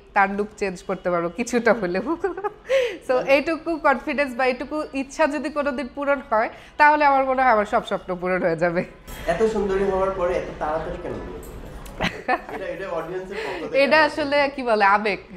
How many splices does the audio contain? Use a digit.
1